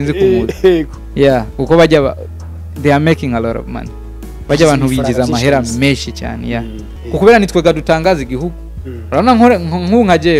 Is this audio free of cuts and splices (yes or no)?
no